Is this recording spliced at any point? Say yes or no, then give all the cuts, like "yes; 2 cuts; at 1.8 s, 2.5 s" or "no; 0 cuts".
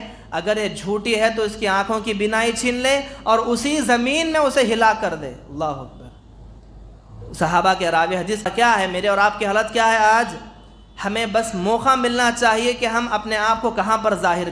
yes; 1 cut; at 8.5 s